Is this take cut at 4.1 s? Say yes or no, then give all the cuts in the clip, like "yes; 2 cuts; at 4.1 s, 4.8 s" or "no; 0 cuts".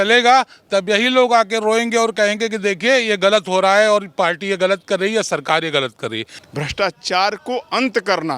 no; 1 cut; at 6.4 s